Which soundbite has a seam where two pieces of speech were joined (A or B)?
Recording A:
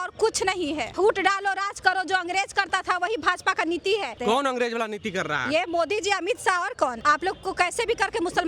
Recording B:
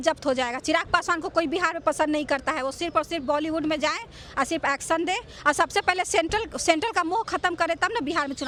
A